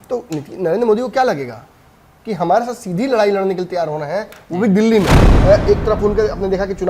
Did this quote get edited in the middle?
yes; 1 cut; at 5.2 s

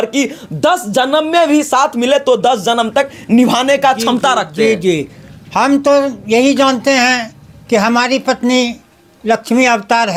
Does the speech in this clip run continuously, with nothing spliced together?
yes; 0 cuts

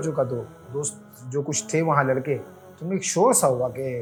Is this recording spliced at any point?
no; 0 cuts

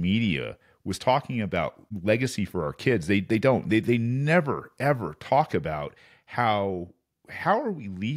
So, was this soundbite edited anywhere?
yes; 1 cut; at 1.9 s

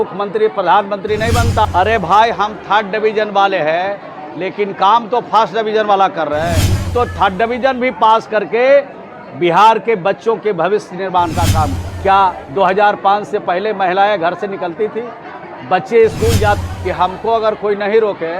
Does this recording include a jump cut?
yes; 4 cuts; at 1.6 s, 6.9 s, 11.8 s, 16.6 s

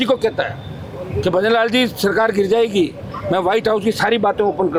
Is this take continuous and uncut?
yes; 0 cuts

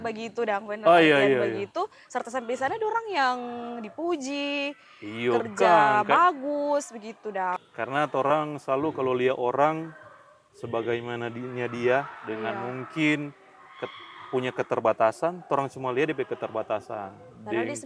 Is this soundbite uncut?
no; 1 cut; at 7.5 s

